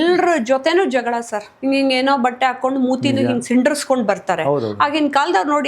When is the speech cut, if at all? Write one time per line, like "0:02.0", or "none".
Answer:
0:01.5

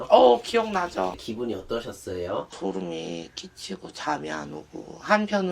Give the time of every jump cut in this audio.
0:01.2
0:02.6

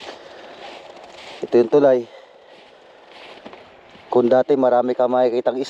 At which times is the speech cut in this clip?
0:03.4

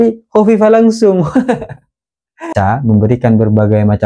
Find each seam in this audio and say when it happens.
0:02.5

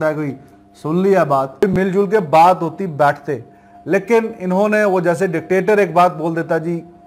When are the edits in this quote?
0:01.6

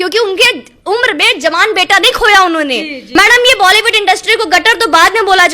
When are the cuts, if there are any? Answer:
0:03.0

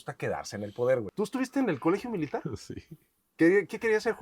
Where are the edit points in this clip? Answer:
0:01.1

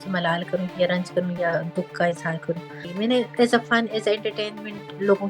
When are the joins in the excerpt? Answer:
0:02.9

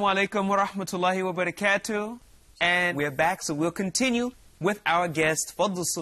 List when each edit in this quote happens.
0:02.9

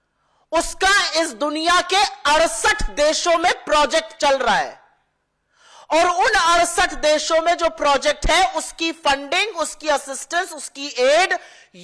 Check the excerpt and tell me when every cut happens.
none

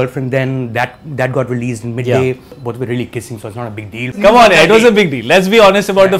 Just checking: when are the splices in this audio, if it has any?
0:02.6
0:04.2

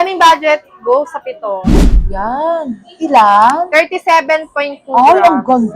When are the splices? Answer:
0:01.7

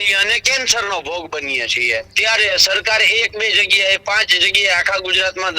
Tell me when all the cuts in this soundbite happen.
0:02.1

